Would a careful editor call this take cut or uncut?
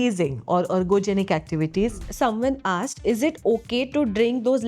cut